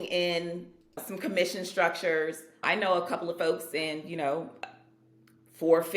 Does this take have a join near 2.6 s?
yes; 2 cuts; at 1.0 s, 2.6 s

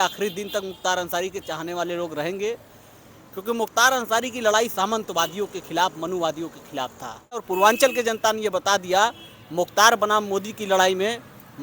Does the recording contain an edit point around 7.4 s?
yes; 1 cut; at 7.4 s

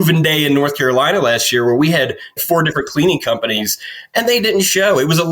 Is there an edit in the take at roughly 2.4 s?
yes; 1 cut; at 2.4 s

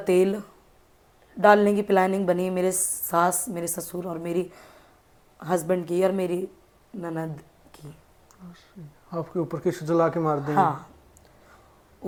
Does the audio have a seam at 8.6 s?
no; 0 cuts

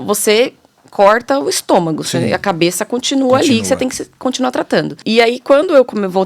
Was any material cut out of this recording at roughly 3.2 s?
no; 1 cut; at 5.0 s

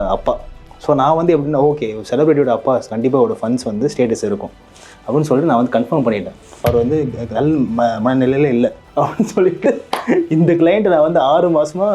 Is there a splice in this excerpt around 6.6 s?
yes; 2 cuts; at 6.6 s, 8.8 s

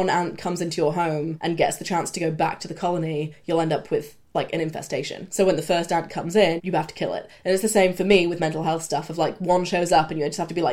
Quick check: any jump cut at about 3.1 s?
no; 3 cuts; at 1.3 s, 5.3 s, 6.6 s

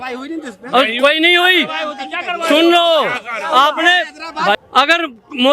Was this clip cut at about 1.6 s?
no; 1 cut; at 4.6 s

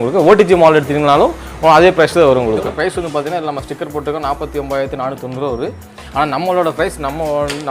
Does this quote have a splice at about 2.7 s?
yes; 1 cut; at 2.7 s

